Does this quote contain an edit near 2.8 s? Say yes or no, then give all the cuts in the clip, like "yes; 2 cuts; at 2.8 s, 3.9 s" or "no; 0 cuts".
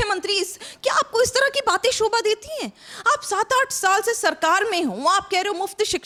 no; 0 cuts